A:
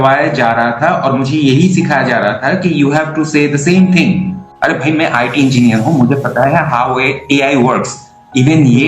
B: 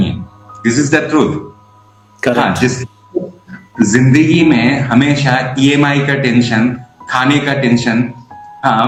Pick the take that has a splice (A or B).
A